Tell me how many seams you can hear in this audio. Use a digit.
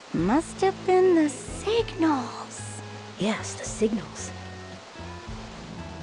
2